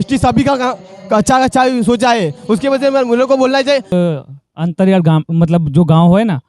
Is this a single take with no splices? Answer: no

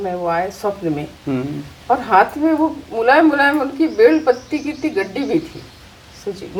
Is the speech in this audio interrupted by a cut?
no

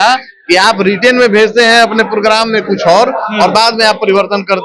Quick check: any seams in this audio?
no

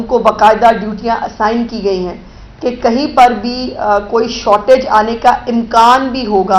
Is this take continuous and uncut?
yes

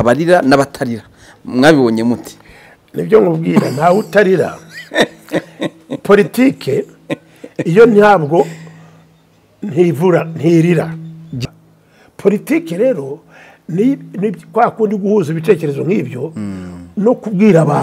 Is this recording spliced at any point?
yes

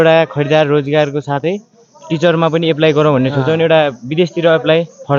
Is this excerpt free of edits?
yes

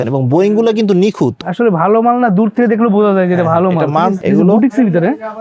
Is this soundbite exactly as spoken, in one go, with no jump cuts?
no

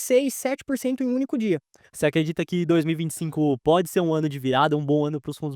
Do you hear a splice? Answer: yes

